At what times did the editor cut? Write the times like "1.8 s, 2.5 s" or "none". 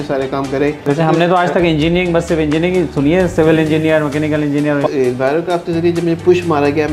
0.9 s, 4.9 s